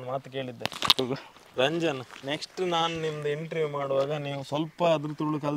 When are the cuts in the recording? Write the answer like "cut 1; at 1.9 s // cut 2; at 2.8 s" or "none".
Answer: cut 1; at 2.1 s